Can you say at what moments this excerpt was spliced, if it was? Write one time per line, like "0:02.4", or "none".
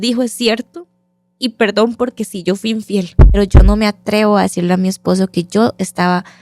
0:03.4